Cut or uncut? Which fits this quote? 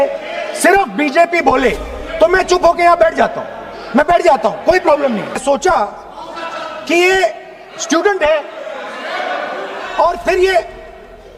cut